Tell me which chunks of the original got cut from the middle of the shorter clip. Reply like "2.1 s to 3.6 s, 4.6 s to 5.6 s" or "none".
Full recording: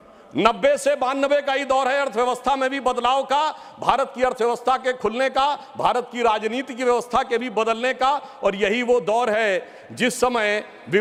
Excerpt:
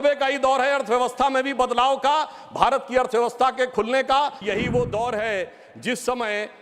5.7 s to 8.6 s